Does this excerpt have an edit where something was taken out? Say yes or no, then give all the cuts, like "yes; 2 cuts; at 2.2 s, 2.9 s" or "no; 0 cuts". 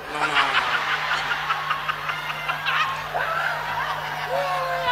no; 0 cuts